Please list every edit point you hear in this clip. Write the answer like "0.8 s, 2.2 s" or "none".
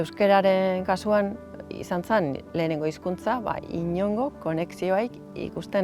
none